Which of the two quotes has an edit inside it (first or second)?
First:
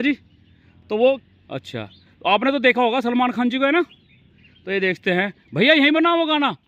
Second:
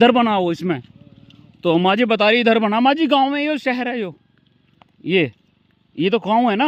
first